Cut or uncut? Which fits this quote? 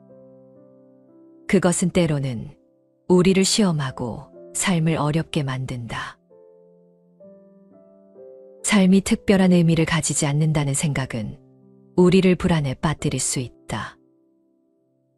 cut